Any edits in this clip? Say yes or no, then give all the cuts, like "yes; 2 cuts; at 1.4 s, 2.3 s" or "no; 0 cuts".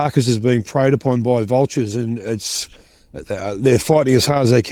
no; 0 cuts